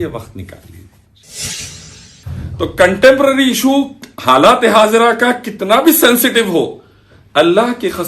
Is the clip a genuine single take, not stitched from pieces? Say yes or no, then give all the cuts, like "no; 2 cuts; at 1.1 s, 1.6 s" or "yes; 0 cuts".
no; 1 cut; at 1.5 s